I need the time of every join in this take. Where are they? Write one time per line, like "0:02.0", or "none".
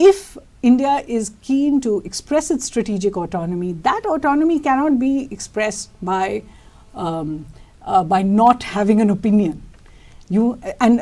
none